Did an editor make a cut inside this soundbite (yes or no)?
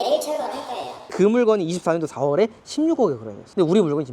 yes